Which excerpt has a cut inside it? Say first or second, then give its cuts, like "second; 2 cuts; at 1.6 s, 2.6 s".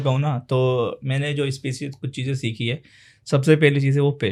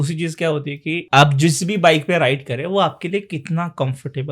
second; 1 cut; at 0.9 s